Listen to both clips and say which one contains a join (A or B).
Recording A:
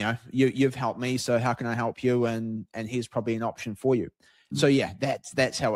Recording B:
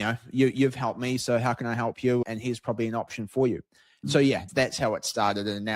B